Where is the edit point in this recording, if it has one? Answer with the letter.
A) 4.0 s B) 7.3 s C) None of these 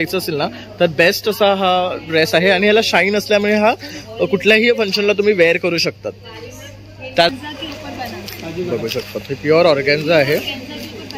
B